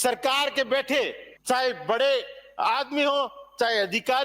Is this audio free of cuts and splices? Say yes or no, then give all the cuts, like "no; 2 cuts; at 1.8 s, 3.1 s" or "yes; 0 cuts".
no; 1 cut; at 1.3 s